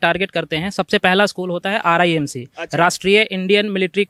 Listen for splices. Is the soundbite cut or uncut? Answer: uncut